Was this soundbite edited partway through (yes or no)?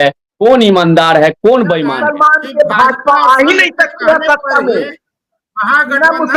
yes